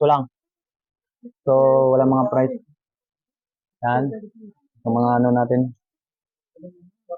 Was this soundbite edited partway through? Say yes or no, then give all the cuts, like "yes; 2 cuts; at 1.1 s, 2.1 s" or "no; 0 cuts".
no; 0 cuts